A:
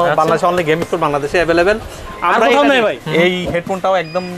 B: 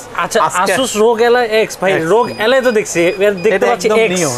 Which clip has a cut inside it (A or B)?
A